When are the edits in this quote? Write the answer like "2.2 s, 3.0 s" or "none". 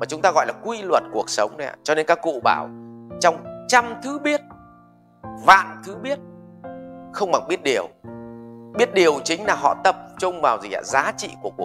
none